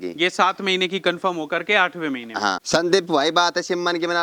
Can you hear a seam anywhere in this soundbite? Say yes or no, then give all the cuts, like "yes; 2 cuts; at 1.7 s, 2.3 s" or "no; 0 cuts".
yes; 1 cut; at 2.6 s